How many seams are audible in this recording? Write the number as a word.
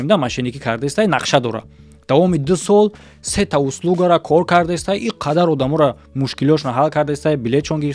zero